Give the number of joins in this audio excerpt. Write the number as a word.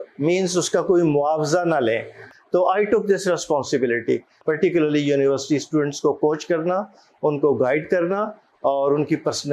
two